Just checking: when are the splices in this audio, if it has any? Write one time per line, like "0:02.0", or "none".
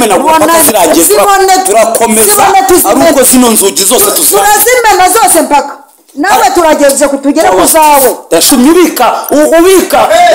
0:08.5